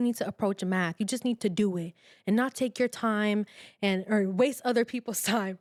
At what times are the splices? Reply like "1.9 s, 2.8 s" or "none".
none